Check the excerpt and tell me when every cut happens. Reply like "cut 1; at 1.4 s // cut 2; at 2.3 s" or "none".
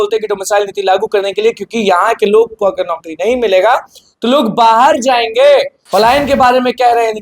cut 1; at 5.8 s